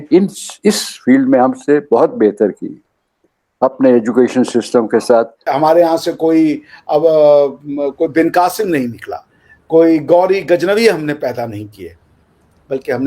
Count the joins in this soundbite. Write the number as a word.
one